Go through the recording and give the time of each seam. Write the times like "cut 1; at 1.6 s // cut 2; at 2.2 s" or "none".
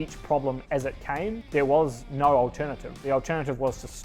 cut 1; at 3.0 s